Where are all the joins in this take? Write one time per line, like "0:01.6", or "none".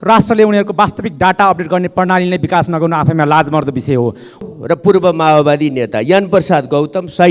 0:04.4